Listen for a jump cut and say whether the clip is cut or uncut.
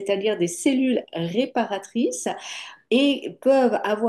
uncut